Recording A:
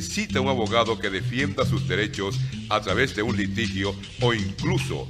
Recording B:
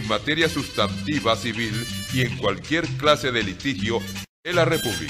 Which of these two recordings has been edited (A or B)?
B